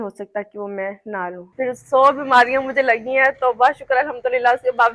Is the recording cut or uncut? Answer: cut